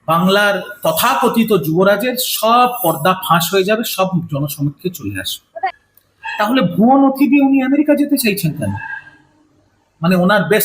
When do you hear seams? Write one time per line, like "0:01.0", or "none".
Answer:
0:05.6